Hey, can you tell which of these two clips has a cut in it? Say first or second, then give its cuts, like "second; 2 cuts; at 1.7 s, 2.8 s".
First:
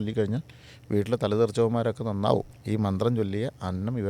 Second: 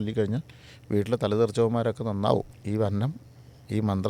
first; 1 cut; at 2.5 s